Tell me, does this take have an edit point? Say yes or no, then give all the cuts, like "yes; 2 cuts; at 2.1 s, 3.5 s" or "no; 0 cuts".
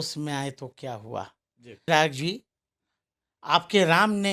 yes; 1 cut; at 1.8 s